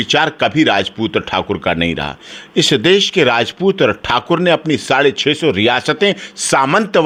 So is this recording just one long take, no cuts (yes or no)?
yes